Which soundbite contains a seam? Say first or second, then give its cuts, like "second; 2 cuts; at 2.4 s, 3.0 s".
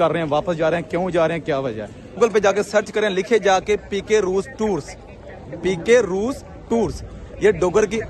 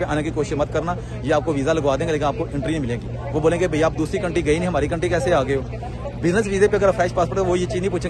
first; 1 cut; at 2.2 s